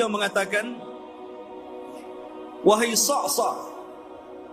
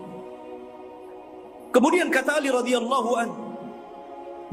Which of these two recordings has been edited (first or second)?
first